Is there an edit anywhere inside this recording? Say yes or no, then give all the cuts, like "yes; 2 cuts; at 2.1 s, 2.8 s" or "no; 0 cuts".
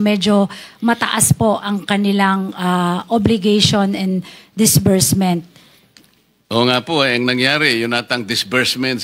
no; 0 cuts